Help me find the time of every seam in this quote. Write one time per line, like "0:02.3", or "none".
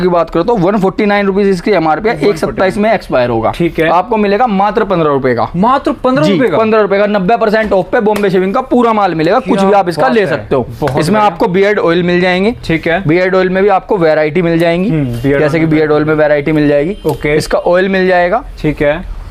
none